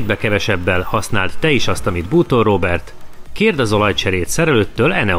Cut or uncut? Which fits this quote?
uncut